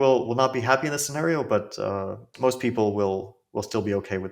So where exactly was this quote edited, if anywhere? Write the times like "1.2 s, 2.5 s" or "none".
2.3 s